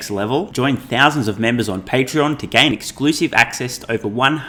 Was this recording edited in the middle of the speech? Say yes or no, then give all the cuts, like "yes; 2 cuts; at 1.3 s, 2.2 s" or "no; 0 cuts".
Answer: no; 0 cuts